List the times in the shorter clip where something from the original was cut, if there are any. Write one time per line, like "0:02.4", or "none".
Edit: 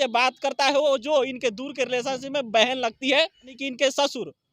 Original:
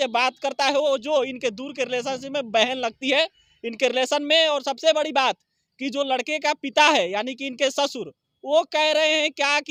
0:03.6